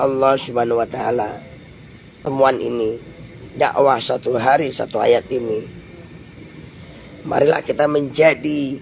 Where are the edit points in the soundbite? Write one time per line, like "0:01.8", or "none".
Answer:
0:02.1